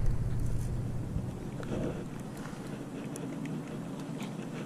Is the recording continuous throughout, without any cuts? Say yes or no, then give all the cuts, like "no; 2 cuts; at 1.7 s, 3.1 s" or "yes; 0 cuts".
yes; 0 cuts